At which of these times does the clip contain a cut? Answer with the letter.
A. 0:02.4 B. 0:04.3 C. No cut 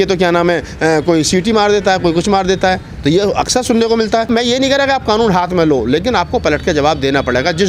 B